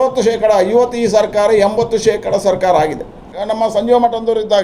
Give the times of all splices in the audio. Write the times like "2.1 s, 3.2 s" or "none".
3.3 s